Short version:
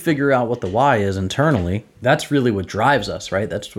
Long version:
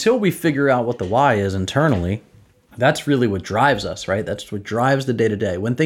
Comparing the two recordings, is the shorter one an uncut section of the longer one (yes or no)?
no